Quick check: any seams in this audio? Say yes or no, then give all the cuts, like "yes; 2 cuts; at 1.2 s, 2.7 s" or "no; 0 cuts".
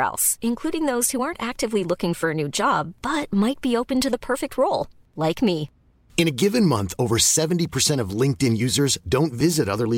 no; 0 cuts